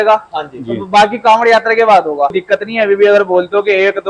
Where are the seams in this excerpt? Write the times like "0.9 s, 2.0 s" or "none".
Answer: 2.4 s